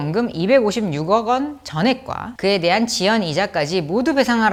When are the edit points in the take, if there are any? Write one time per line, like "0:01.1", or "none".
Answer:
none